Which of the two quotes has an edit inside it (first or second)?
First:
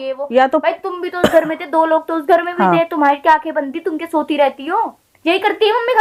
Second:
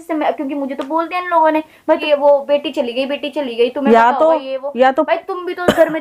second